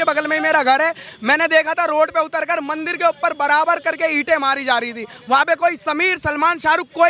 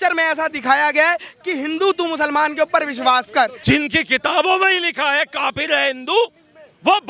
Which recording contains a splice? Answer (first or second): second